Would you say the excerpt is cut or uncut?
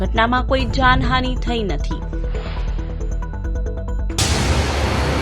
cut